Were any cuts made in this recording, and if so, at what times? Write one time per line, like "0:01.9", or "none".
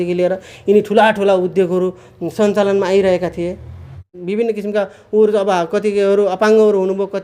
0:03.8